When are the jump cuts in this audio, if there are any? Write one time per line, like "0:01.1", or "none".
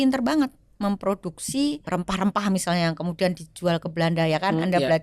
0:01.8